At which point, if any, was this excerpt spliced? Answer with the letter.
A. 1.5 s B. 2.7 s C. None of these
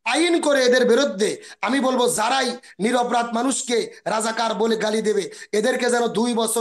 C